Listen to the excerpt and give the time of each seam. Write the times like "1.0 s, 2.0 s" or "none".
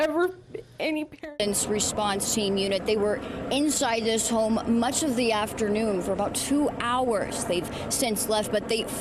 1.3 s